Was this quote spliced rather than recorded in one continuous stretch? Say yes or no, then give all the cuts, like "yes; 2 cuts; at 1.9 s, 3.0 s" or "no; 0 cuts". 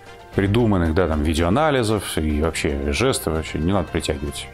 no; 0 cuts